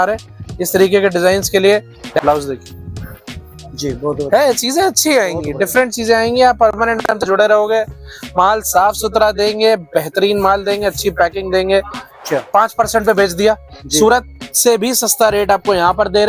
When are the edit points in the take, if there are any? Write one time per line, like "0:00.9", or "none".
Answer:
0:02.2
0:12.2